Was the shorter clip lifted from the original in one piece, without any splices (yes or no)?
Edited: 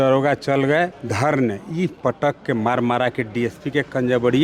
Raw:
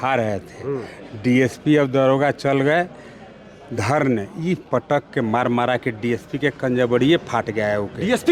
no